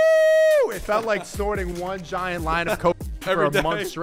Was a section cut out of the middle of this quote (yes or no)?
no